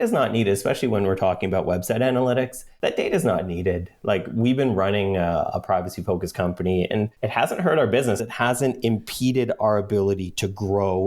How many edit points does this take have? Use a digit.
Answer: 3